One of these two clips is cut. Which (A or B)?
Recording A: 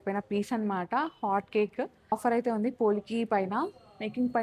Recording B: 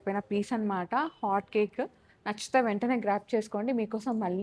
A